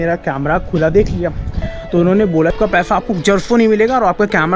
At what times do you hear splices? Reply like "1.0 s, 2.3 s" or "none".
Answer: 2.5 s